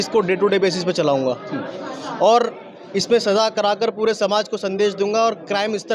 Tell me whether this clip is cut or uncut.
uncut